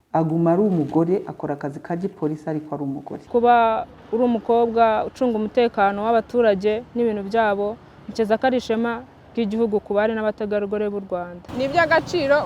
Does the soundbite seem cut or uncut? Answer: cut